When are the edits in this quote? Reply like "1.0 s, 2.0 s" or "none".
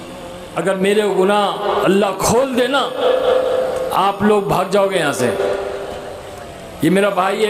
none